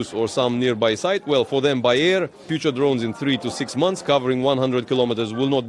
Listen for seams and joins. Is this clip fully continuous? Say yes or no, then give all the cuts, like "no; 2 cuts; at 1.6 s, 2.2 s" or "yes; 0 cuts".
no; 1 cut; at 2.4 s